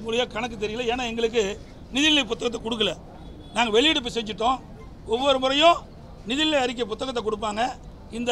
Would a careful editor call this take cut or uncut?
uncut